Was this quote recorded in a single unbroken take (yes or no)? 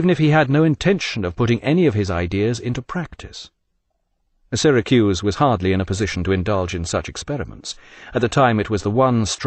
no